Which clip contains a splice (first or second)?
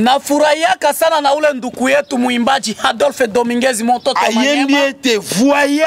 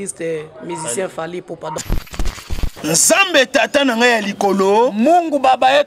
second